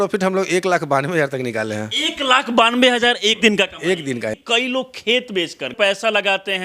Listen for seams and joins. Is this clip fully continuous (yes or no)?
no